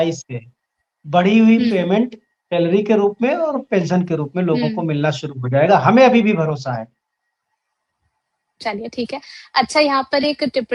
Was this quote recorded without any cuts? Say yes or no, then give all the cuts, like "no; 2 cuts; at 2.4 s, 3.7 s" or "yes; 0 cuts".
yes; 0 cuts